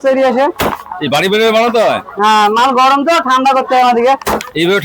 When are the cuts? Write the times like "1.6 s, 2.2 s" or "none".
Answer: none